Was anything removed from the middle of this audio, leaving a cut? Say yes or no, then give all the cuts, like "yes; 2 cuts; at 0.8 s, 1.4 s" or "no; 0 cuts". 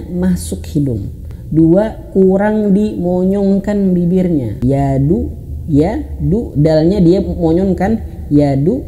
yes; 2 cuts; at 1.3 s, 4.5 s